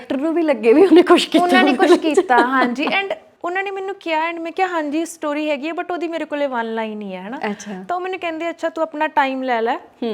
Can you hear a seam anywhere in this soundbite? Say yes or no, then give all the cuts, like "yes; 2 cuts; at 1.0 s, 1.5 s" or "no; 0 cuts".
no; 0 cuts